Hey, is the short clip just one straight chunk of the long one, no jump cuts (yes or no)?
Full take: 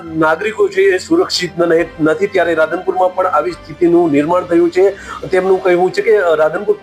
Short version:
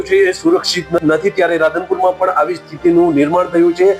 no